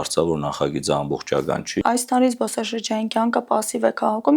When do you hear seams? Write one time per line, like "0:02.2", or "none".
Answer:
0:01.8

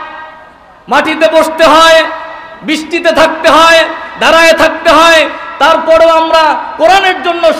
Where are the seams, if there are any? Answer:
none

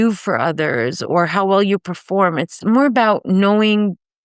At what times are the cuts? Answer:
0:02.5

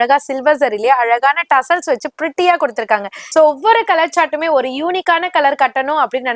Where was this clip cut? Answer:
0:03.2

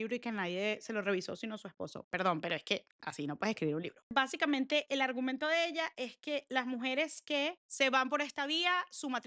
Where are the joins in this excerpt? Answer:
none

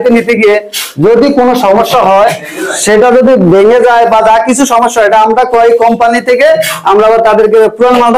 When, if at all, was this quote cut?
none

